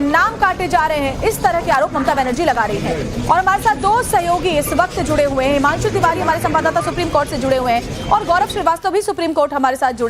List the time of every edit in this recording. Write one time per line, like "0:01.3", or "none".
0:06.8